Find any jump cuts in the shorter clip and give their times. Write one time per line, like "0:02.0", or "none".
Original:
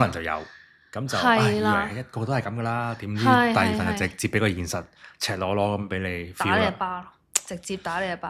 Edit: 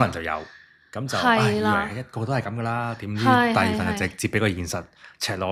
none